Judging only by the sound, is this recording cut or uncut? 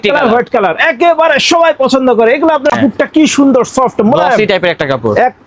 cut